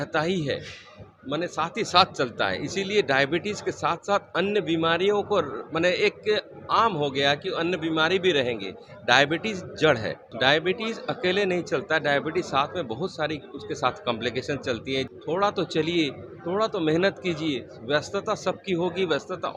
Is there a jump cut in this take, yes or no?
yes